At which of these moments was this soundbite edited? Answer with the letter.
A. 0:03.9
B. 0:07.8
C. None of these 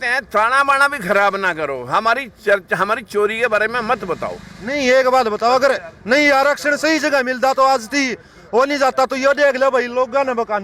C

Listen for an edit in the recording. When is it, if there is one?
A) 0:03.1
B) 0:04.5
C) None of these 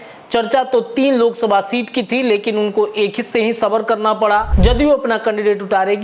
B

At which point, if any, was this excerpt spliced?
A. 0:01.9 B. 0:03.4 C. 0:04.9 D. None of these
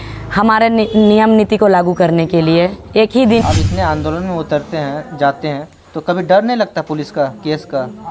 B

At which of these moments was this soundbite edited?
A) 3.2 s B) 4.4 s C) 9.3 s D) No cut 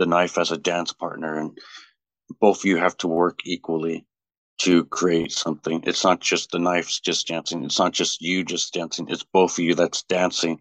D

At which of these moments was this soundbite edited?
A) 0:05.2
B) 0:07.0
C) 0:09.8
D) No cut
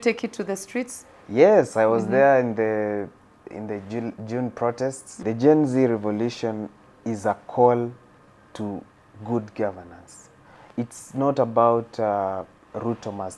A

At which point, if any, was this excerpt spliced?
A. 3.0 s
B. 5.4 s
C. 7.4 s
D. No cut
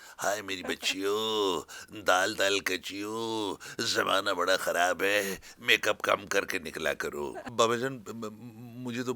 C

